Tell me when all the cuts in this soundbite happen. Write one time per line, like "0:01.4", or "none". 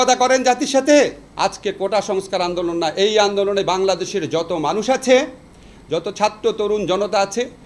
0:01.2